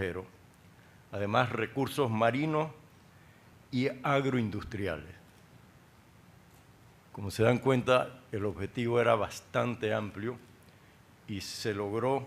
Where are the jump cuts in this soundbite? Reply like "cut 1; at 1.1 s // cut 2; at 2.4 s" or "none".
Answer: cut 1; at 6.5 s